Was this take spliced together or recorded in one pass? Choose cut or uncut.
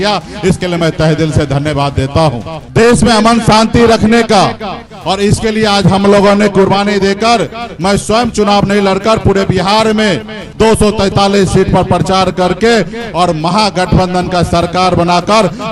cut